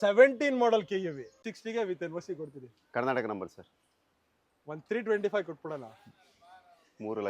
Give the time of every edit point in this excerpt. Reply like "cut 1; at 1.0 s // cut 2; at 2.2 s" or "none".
cut 1; at 1.5 s